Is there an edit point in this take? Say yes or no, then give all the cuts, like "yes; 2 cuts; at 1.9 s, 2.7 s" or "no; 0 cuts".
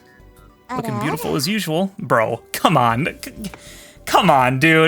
no; 0 cuts